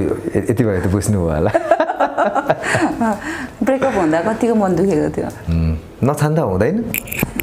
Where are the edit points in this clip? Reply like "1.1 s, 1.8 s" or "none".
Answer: 5.5 s